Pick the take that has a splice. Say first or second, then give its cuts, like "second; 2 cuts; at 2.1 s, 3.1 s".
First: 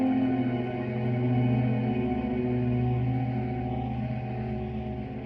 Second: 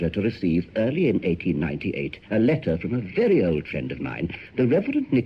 second; 1 cut; at 4.0 s